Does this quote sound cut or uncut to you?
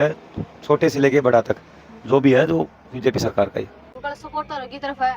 cut